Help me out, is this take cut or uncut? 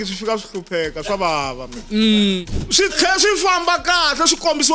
cut